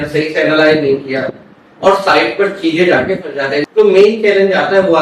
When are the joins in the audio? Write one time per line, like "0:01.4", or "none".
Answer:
0:03.6

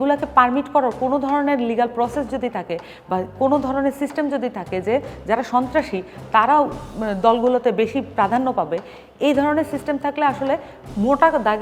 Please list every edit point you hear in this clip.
none

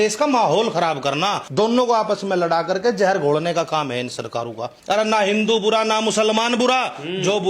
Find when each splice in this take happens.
0:01.4
0:04.7

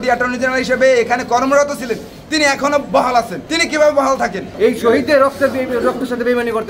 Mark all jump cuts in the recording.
0:03.4
0:04.5

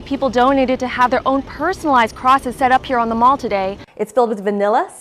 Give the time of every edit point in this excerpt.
0:03.8

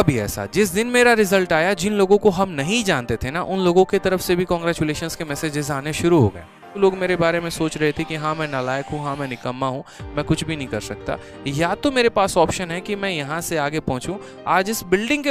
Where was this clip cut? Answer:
0:06.8

